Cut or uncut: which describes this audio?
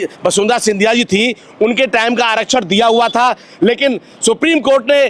uncut